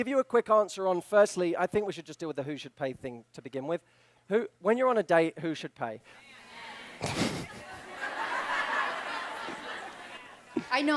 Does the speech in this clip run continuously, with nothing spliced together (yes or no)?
yes